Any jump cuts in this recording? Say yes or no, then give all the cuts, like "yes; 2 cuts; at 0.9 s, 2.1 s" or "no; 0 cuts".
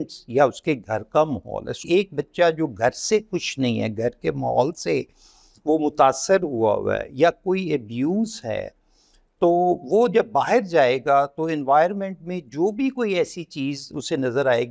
yes; 1 cut; at 1.8 s